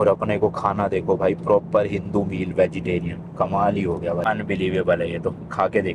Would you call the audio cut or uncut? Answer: uncut